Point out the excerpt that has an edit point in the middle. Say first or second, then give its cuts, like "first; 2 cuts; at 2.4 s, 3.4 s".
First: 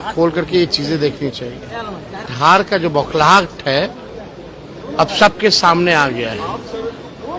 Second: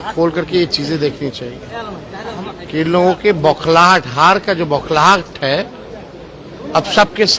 first; 1 cut; at 2.3 s